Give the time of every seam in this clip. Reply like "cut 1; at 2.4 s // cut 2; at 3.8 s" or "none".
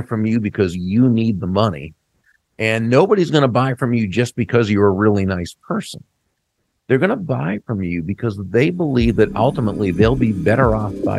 none

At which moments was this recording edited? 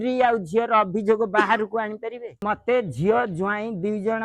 cut 1; at 2.4 s

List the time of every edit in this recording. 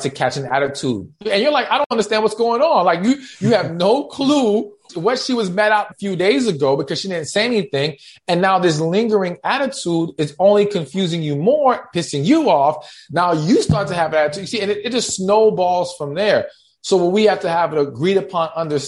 cut 1; at 1.2 s // cut 2; at 4.9 s // cut 3; at 5.9 s

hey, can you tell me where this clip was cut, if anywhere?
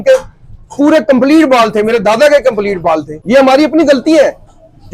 cut 1; at 3.1 s

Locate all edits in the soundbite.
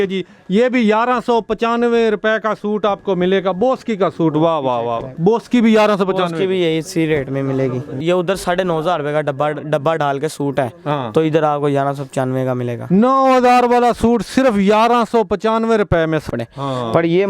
cut 1; at 5.1 s // cut 2; at 7.9 s // cut 3; at 16.3 s

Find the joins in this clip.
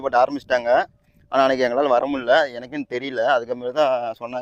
none

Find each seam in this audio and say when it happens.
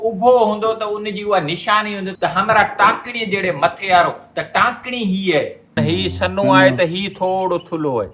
cut 1; at 5.8 s

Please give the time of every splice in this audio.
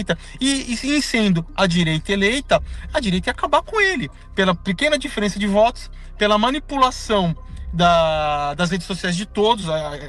cut 1; at 4.2 s

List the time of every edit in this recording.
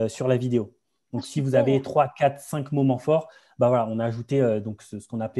none

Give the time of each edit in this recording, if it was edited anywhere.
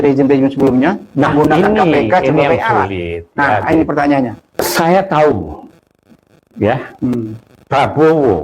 cut 1; at 4.5 s

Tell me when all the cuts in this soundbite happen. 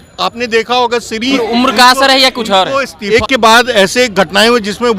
cut 1; at 1.4 s // cut 2; at 3.1 s

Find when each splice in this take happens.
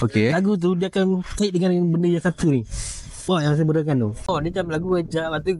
cut 1; at 4.2 s

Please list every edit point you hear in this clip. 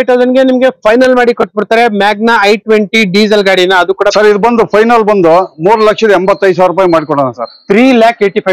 cut 1; at 4.1 s

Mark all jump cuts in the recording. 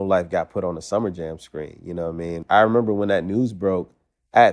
cut 1; at 2.3 s

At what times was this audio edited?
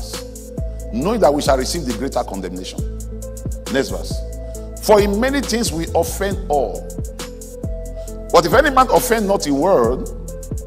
none

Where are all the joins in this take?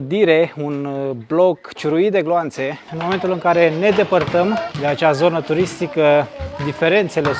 cut 1; at 2.9 s // cut 2; at 4.7 s

